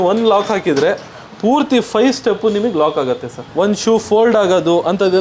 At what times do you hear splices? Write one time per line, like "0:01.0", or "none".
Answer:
0:03.4